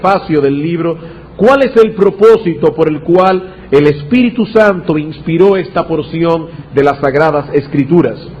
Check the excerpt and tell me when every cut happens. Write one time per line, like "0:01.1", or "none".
0:07.0